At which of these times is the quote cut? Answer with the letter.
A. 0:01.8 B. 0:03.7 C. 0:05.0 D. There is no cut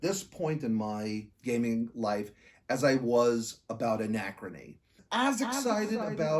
C